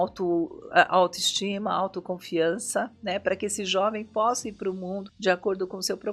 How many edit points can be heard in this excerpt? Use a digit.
1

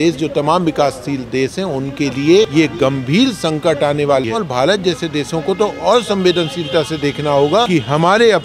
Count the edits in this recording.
3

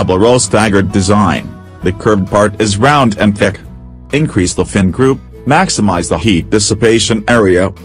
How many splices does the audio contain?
1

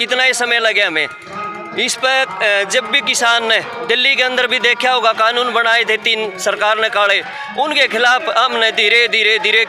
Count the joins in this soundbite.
0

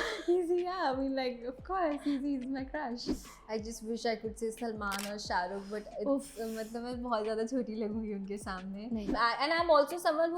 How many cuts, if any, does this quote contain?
2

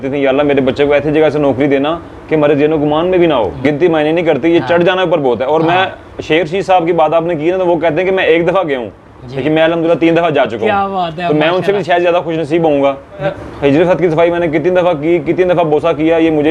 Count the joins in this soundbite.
2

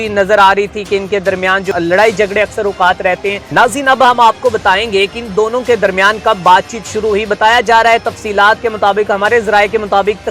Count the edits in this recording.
2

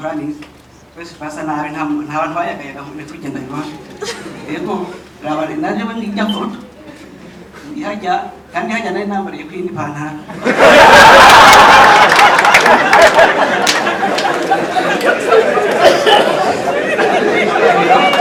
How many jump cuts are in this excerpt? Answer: 0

